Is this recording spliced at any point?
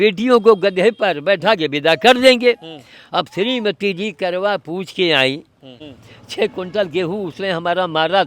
yes; 1 cut; at 5.9 s

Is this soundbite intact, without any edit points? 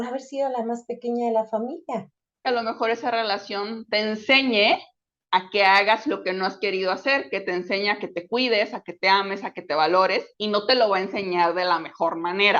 no; 1 cut; at 2.4 s

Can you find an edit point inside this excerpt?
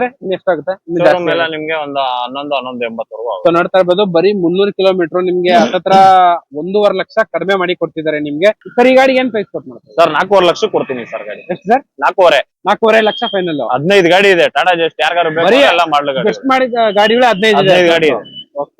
yes; 1 cut; at 8.6 s

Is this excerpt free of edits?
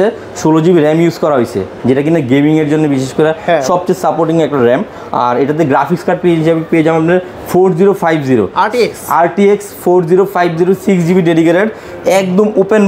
yes; 0 cuts

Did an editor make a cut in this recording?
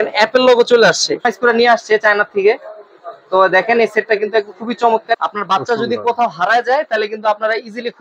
yes; 2 cuts; at 1.3 s, 5.2 s

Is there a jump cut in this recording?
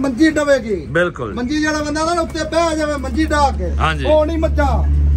no; 0 cuts

